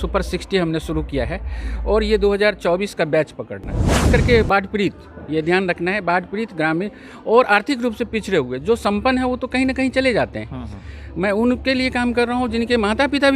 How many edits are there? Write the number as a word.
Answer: one